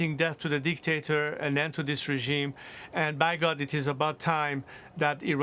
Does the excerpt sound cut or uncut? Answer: uncut